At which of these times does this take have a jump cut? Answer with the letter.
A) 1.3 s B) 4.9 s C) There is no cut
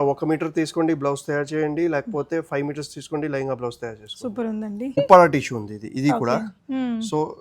B